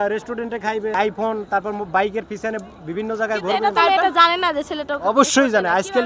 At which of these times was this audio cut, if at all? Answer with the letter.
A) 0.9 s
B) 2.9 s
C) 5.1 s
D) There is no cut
A